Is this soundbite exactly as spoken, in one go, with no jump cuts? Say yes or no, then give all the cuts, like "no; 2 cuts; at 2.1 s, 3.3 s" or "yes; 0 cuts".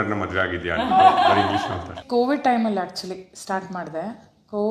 no; 1 cut; at 2.0 s